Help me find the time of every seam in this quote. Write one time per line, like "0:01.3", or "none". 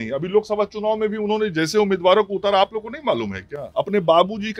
0:03.6